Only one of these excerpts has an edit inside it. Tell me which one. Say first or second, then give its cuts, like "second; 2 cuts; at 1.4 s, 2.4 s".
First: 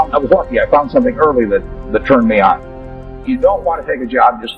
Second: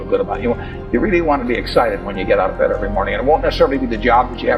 first; 1 cut; at 2.6 s